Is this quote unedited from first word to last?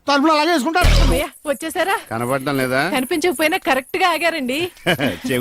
no; 1 cut; at 1.0 s

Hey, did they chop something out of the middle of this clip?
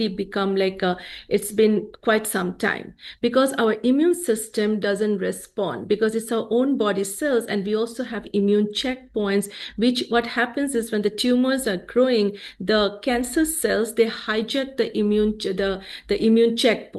no; 0 cuts

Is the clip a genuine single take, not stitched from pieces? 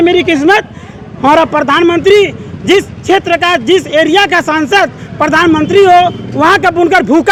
yes; 0 cuts

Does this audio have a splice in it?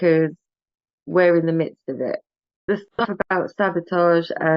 yes; 1 cut; at 2.9 s

